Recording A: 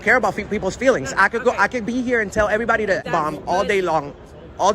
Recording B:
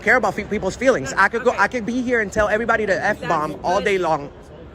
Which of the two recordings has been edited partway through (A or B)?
A